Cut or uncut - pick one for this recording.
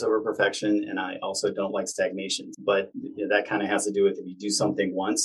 cut